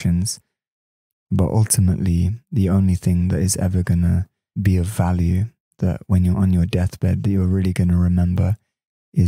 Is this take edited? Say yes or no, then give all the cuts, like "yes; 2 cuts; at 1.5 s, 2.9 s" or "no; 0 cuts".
yes; 1 cut; at 4.5 s